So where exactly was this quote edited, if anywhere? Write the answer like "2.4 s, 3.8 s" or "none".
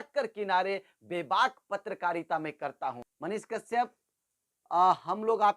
3.1 s